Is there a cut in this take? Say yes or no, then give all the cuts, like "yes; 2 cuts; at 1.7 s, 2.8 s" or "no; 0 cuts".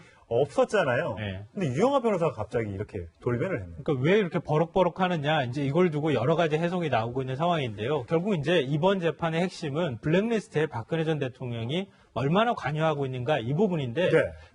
yes; 1 cut; at 13.5 s